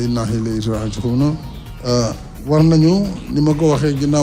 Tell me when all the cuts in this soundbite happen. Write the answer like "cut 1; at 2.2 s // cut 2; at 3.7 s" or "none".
cut 1; at 2.3 s